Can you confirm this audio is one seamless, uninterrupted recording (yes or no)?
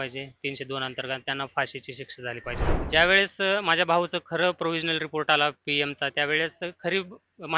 no